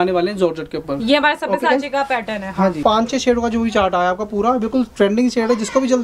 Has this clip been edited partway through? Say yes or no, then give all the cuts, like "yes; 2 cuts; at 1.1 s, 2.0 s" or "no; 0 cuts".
yes; 1 cut; at 2.8 s